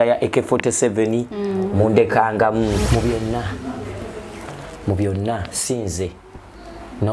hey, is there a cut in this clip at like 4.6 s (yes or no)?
no